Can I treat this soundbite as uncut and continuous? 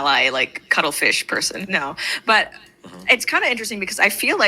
no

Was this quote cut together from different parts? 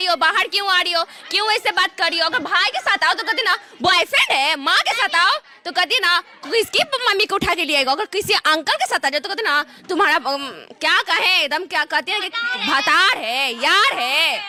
no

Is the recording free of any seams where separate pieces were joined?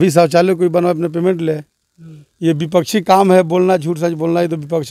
yes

